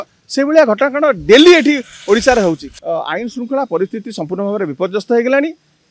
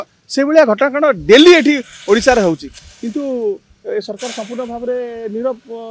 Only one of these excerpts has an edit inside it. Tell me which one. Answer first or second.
first